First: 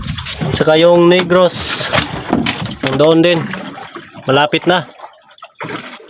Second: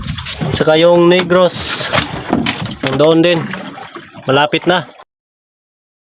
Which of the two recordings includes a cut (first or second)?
first